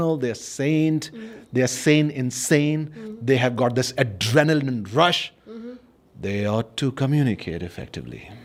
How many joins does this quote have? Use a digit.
0